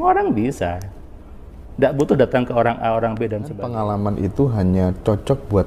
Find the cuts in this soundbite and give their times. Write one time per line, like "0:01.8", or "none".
0:03.6